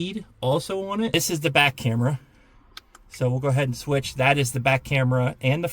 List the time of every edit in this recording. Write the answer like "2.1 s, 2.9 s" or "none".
1.1 s